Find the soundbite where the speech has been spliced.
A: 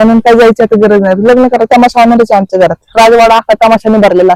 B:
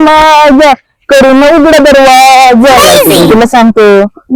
B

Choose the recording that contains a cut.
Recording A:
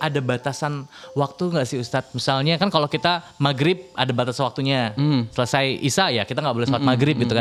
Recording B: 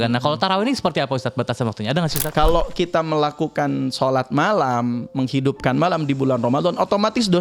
B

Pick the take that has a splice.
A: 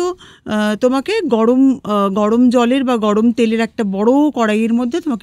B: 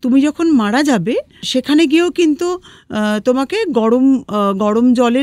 B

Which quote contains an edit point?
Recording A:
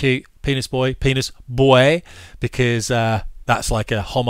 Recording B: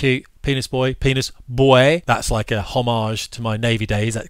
B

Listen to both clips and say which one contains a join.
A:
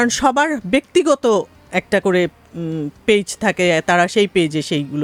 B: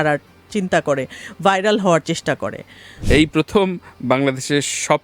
B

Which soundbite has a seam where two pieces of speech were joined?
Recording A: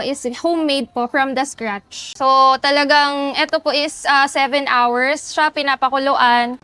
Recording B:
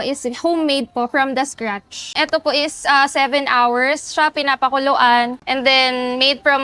B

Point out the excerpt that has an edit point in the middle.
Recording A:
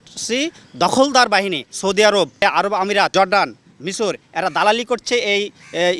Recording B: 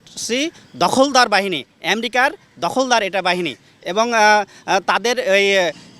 A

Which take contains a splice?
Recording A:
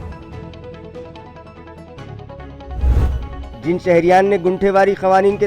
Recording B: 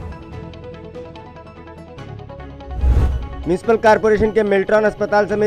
B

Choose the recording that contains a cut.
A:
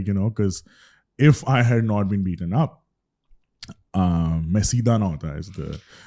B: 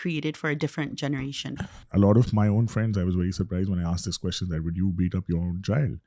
B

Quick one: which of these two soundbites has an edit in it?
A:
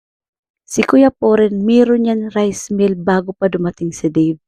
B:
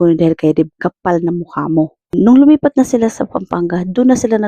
B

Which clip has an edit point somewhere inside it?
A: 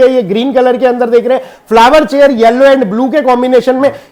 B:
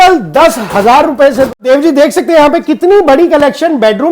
B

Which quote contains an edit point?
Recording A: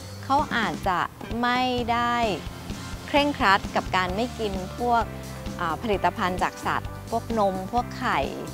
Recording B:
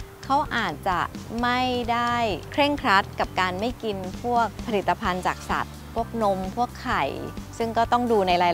B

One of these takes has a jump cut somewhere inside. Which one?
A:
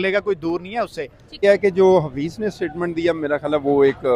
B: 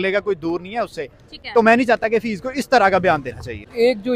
A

